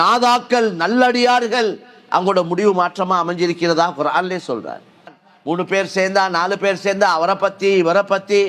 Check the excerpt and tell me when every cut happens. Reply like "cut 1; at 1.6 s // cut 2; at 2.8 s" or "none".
cut 1; at 5.3 s